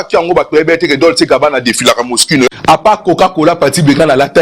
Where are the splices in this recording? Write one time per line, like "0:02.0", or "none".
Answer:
0:02.5